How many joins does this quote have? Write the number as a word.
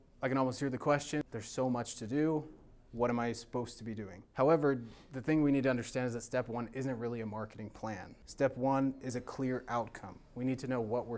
three